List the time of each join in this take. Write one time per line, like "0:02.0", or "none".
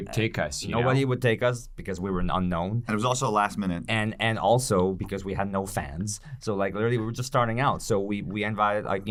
none